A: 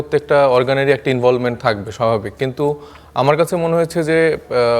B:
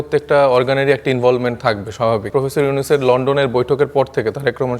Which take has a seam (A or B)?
B